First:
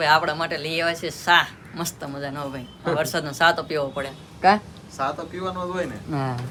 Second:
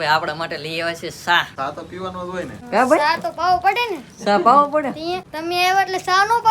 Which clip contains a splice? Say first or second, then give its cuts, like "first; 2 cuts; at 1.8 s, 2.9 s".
second; 3 cuts; at 1.5 s, 2.6 s, 5.3 s